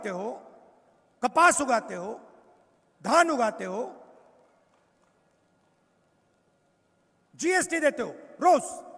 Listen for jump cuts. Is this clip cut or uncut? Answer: uncut